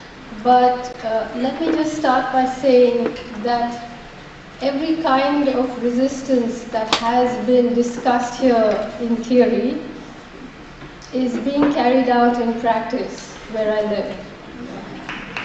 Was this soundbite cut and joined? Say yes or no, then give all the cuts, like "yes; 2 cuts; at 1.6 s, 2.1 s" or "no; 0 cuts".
no; 0 cuts